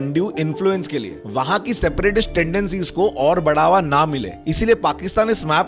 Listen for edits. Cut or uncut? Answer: cut